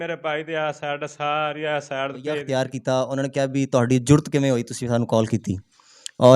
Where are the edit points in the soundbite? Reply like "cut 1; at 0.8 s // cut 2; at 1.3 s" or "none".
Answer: cut 1; at 2.4 s

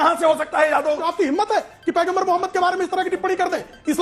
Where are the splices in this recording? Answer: cut 1; at 1.1 s

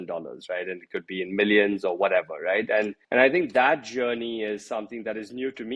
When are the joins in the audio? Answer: cut 1; at 3.0 s

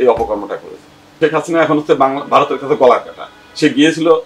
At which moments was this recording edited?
cut 1; at 1.0 s

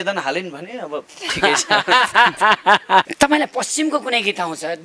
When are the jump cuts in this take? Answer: none

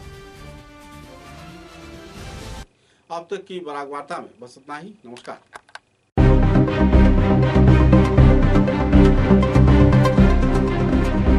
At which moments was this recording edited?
none

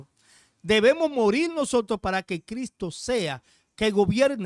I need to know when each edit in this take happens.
none

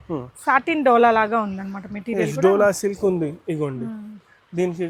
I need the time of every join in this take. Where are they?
none

